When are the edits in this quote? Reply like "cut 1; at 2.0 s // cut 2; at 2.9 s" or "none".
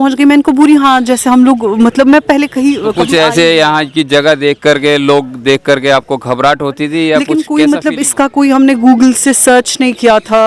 cut 1; at 3.0 s // cut 2; at 7.3 s